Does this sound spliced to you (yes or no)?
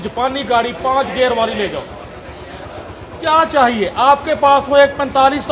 no